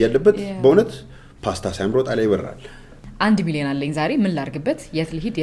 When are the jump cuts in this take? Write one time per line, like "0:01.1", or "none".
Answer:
0:03.0

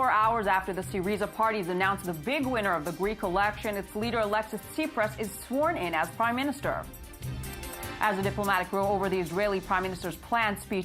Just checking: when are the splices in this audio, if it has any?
0:05.9

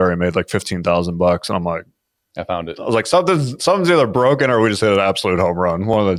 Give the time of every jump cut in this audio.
none

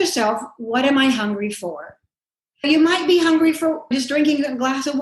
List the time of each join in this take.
0:02.6
0:03.9

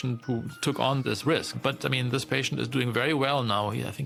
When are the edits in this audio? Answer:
none

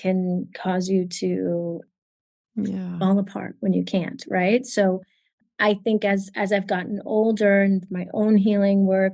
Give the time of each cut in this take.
none

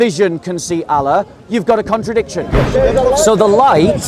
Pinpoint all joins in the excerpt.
0:02.6

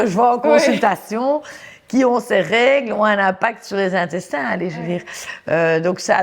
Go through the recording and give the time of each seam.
none

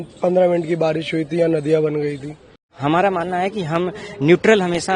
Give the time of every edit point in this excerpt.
0:02.7

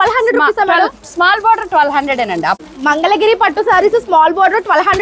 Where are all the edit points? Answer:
0:02.6

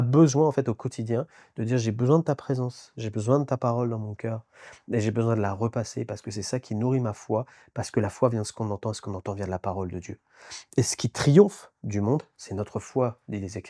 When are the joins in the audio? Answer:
none

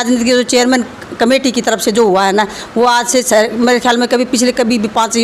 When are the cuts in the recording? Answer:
none

